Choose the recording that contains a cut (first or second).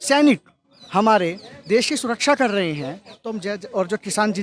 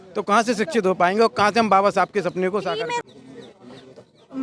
second